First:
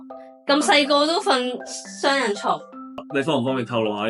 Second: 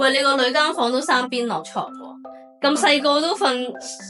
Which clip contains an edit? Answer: first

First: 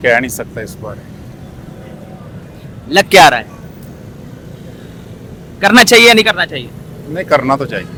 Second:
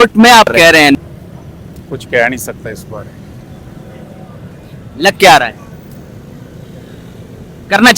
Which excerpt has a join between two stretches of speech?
second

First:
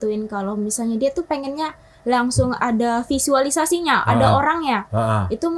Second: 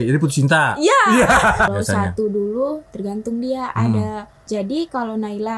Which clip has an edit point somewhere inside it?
second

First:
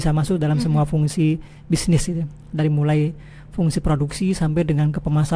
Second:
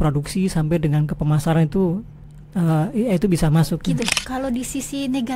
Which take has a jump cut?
second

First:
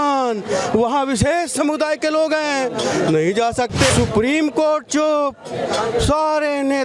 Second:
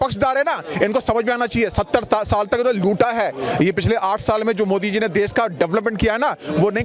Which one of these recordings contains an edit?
first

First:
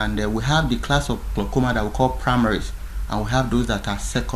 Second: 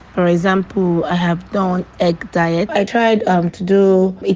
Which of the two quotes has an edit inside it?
second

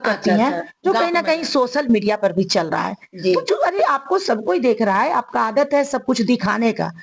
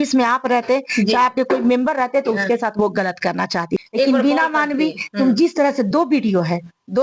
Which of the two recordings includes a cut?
second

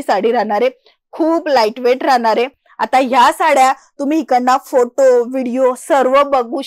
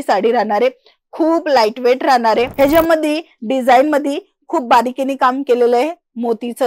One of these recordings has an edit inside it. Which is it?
second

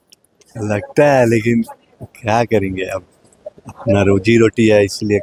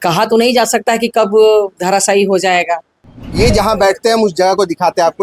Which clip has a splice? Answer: second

